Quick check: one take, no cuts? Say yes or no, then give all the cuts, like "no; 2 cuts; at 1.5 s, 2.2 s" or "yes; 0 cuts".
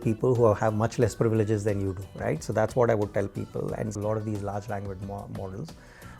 no; 1 cut; at 4.0 s